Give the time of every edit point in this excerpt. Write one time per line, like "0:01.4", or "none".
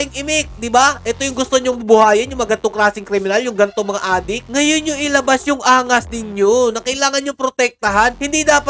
none